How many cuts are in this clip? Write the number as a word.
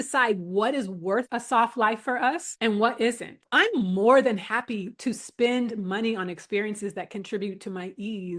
three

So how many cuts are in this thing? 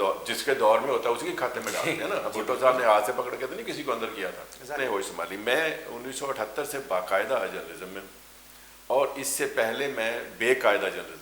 one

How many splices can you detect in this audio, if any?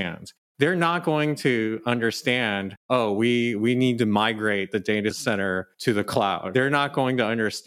one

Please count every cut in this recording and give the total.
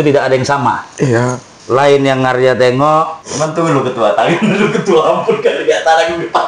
two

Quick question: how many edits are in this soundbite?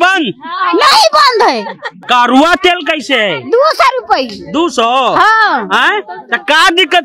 one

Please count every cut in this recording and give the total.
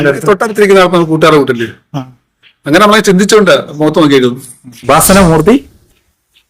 one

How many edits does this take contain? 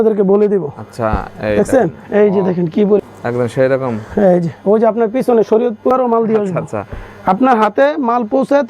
two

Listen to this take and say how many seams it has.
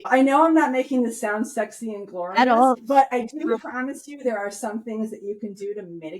one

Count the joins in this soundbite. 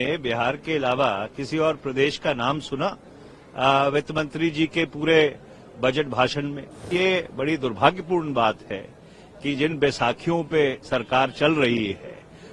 one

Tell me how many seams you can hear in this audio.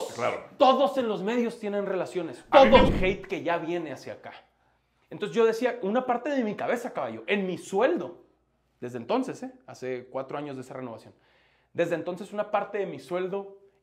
one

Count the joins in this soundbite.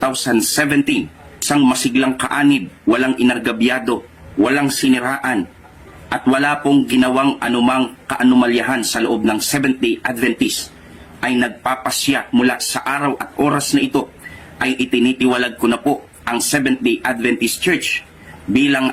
zero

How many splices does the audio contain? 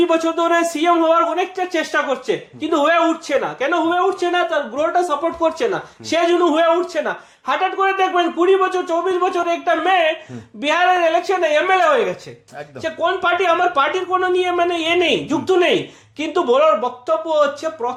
zero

